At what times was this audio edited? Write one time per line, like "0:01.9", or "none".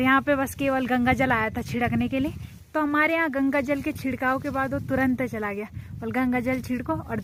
none